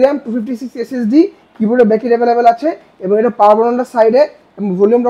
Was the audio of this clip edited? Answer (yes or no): no